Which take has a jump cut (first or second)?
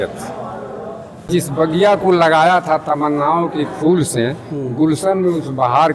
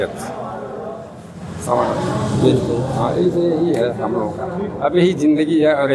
first